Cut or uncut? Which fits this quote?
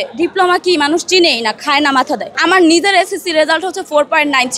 cut